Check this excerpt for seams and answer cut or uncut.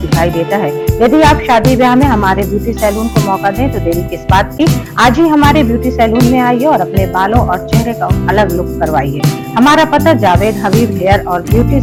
uncut